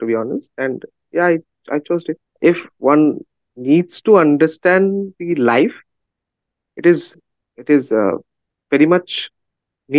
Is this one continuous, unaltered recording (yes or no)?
no